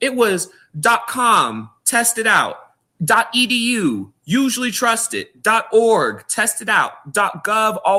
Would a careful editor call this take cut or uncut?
uncut